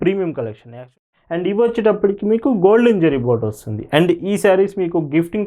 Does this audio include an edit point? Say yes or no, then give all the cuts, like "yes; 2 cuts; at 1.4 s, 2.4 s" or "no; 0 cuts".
yes; 1 cut; at 0.9 s